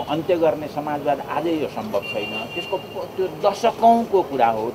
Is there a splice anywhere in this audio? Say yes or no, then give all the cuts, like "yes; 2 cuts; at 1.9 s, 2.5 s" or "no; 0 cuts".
no; 0 cuts